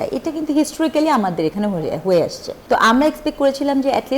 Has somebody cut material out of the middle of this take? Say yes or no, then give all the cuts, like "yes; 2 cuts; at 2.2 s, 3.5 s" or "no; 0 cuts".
yes; 1 cut; at 2.5 s